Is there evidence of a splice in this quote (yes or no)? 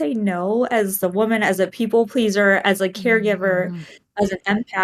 yes